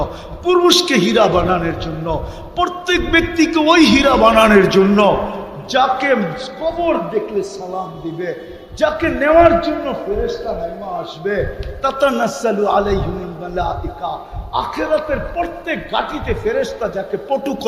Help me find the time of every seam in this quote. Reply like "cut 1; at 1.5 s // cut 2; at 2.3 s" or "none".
none